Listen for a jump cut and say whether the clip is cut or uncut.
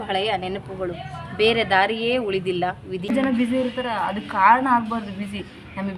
cut